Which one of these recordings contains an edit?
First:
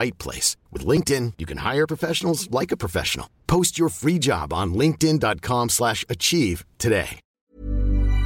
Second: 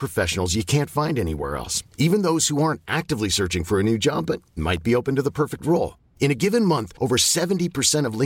first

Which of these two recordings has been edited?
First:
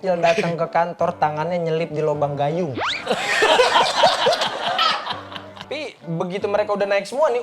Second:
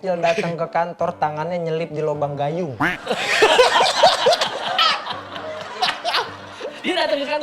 first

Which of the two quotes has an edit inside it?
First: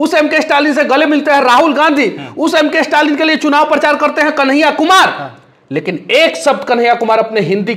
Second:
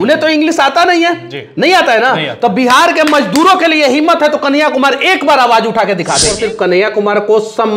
second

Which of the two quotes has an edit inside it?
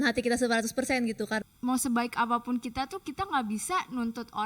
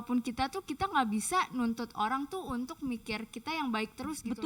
first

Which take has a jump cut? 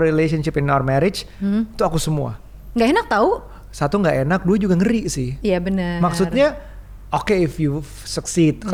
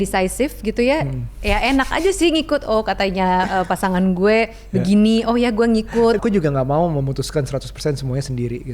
second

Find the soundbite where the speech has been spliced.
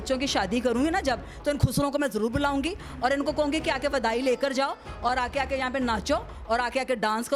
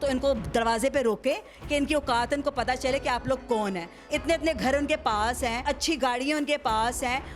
second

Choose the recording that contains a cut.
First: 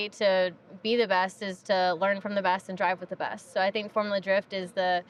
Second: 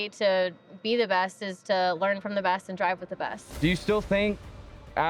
second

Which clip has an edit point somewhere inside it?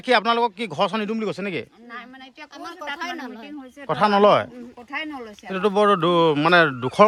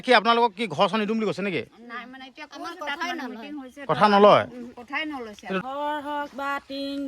second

